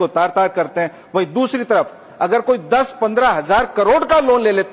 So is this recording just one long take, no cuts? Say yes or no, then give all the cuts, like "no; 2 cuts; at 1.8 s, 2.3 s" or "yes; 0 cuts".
yes; 0 cuts